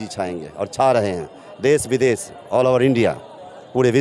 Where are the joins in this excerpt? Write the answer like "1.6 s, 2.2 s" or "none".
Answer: none